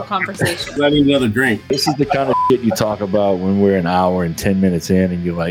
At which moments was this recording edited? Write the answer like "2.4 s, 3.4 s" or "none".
0.8 s, 1.7 s